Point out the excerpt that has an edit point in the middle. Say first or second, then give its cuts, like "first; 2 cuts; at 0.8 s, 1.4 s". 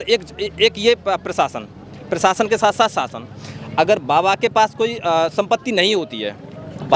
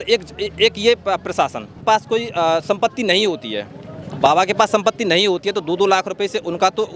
second; 1 cut; at 1.8 s